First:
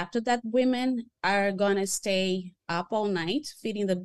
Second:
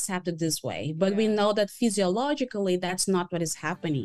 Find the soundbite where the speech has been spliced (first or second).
first